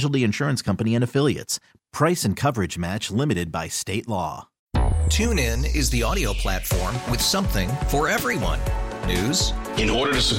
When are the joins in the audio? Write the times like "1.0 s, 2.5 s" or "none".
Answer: 4.5 s